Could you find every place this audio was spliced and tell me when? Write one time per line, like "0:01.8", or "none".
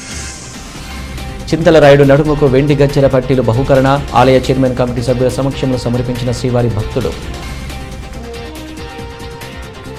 none